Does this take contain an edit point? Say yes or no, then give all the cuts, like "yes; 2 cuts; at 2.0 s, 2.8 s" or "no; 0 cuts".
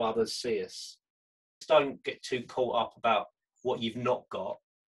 yes; 1 cut; at 1.6 s